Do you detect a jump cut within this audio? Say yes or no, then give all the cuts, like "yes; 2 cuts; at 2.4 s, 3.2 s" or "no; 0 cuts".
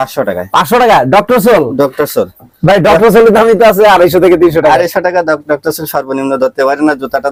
no; 0 cuts